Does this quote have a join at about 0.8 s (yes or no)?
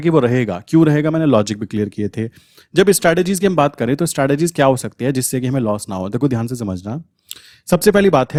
no